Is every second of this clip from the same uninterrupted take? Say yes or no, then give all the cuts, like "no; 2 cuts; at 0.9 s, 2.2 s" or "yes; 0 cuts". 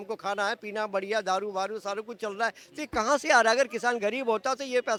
yes; 0 cuts